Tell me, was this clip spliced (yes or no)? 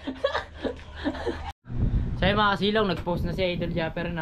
yes